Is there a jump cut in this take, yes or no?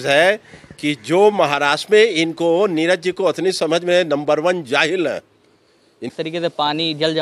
yes